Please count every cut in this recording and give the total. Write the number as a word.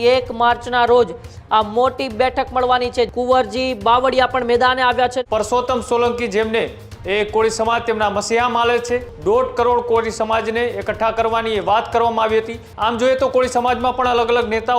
four